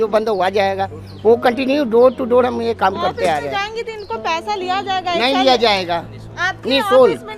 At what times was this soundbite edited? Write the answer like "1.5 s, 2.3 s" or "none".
none